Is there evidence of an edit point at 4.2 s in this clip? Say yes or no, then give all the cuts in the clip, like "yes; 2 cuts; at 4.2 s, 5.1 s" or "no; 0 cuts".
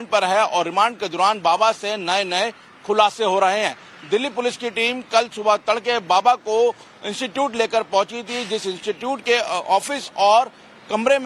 no; 1 cut; at 9.4 s